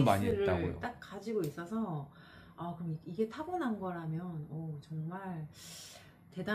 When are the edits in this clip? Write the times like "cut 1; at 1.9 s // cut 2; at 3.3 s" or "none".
none